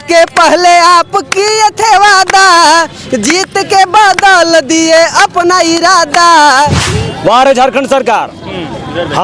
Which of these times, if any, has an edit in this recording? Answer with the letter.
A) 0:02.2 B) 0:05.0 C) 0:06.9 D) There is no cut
C